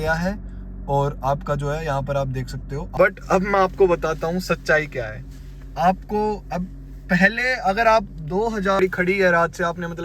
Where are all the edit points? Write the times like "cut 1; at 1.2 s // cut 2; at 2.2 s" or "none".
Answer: cut 1; at 2.8 s // cut 2; at 8.8 s